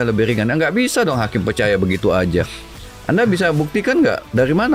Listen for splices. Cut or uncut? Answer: uncut